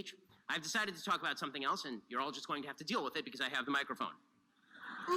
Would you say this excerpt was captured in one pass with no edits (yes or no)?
no